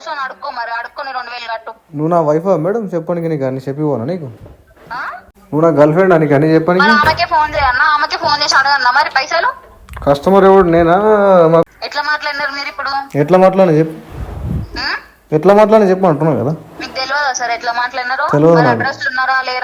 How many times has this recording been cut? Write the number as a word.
one